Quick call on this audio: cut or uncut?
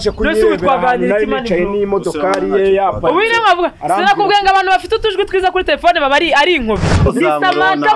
cut